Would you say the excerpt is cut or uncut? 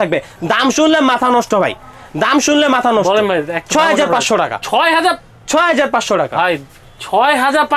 uncut